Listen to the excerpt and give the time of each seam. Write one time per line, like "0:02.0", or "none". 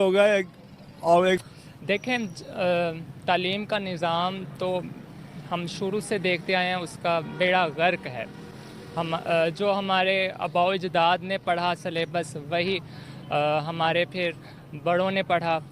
0:01.4

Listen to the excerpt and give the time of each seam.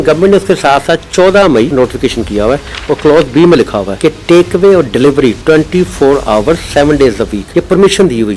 0:01.7
0:03.8
0:07.4

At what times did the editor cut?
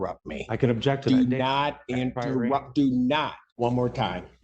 0:03.4

